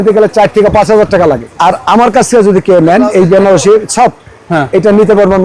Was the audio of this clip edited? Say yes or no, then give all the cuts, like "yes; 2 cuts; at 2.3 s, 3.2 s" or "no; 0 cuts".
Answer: yes; 1 cut; at 1.5 s